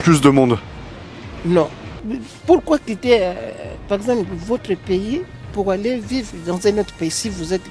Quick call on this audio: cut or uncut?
uncut